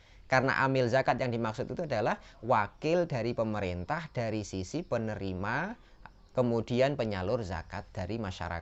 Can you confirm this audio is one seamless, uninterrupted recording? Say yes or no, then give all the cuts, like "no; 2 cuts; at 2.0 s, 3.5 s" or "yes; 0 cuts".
yes; 0 cuts